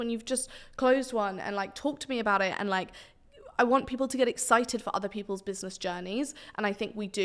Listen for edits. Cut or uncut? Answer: uncut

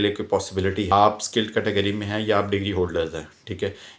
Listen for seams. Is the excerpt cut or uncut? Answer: cut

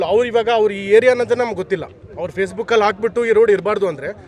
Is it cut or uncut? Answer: uncut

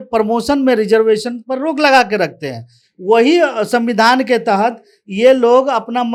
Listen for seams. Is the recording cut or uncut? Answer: uncut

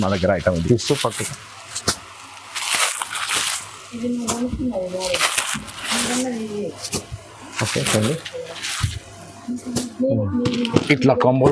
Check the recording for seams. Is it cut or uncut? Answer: uncut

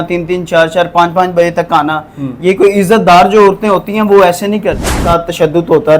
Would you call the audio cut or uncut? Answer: cut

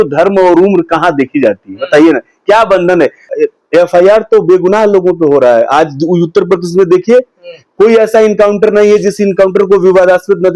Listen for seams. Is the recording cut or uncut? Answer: cut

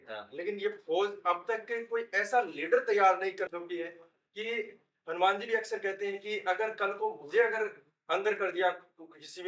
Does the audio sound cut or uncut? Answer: uncut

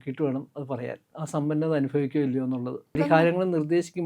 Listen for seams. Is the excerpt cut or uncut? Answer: cut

